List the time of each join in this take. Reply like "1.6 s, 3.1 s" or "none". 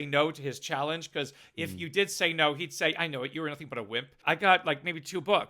4.2 s